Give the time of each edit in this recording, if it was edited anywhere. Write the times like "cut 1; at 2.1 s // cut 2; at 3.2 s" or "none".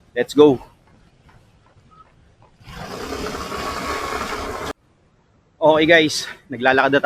cut 1; at 4.7 s